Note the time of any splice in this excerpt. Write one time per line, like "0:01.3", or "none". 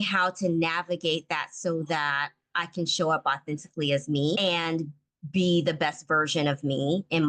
none